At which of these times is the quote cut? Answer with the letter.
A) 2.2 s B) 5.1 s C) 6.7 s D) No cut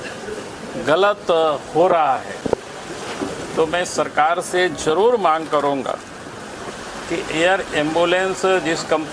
C